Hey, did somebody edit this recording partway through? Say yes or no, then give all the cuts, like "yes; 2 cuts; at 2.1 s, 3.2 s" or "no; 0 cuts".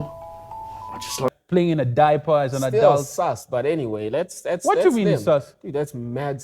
yes; 1 cut; at 1.3 s